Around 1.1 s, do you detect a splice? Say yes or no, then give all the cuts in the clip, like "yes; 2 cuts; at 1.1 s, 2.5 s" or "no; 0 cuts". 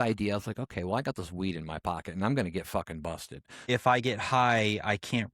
no; 1 cut; at 3.6 s